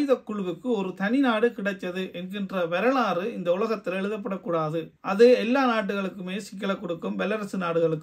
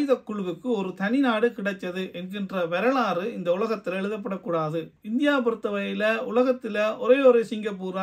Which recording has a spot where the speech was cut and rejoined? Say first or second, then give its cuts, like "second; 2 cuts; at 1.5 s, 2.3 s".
second; 1 cut; at 4.9 s